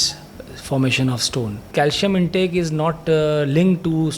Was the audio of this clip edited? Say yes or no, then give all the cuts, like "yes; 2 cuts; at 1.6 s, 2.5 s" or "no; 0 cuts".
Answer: yes; 1 cut; at 1.7 s